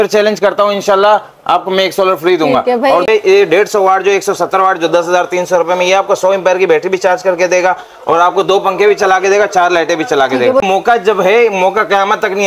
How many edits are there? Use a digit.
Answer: 2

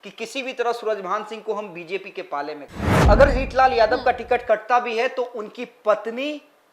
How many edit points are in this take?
1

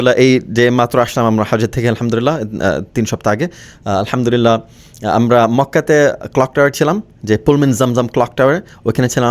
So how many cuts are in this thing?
0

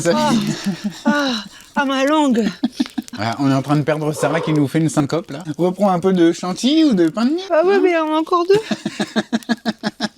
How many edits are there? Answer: 3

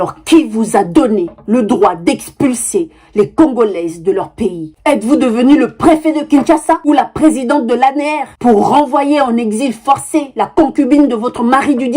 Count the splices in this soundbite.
1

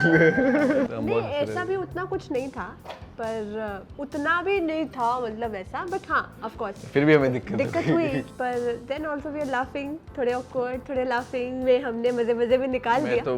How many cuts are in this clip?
2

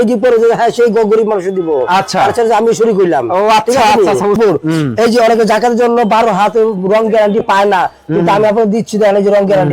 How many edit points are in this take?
1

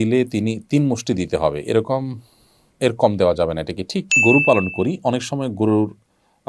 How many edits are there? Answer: 1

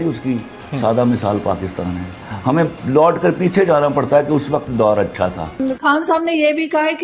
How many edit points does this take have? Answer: 1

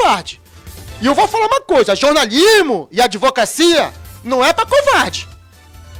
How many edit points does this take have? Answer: 0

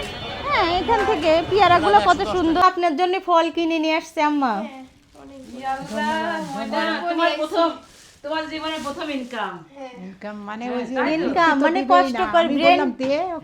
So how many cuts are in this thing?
1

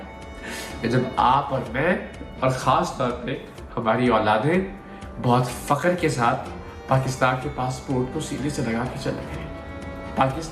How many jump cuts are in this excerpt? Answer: 0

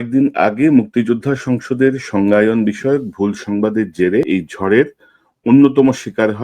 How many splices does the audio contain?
1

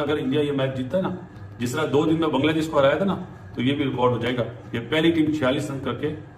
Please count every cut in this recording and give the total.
0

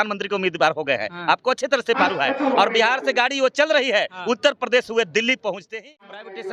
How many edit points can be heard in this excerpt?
1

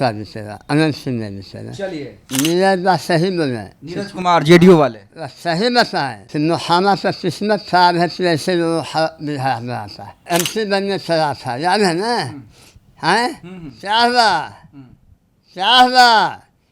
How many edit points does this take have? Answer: 2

